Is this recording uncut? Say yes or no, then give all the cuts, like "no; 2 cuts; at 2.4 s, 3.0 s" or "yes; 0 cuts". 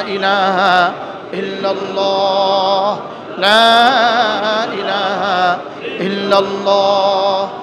yes; 0 cuts